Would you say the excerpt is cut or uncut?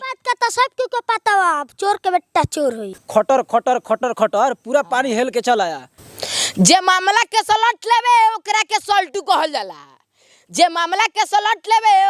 cut